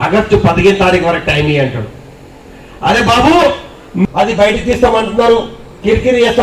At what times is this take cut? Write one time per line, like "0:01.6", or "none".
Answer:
0:04.0